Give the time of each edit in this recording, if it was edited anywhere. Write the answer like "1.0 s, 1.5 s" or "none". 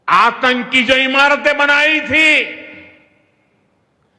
none